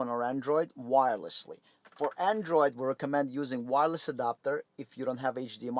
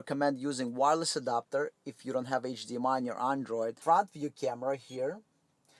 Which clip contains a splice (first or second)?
second